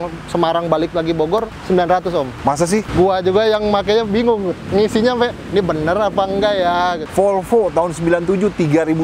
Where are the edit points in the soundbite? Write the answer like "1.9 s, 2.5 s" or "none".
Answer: 1.5 s, 2.5 s, 4.6 s, 7.0 s